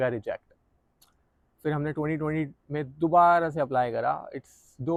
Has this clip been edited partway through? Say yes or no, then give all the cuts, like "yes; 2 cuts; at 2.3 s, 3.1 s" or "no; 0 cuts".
no; 0 cuts